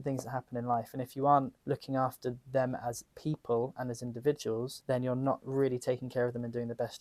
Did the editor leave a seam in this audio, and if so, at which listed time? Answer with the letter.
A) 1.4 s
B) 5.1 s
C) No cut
C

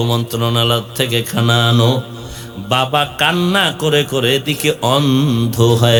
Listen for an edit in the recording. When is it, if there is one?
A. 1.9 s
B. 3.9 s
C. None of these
C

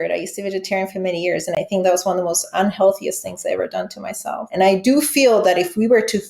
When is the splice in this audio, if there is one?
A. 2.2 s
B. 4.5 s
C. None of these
B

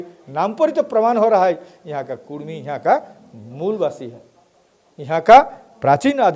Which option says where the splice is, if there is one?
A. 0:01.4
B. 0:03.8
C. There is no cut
C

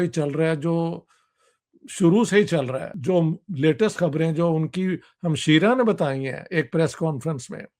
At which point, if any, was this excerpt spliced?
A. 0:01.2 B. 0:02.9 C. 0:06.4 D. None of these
B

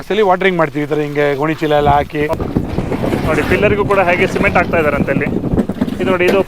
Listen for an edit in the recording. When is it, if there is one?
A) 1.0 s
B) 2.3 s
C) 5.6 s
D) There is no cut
B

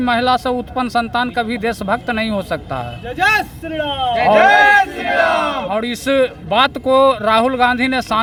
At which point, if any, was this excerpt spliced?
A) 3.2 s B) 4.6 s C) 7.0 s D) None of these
D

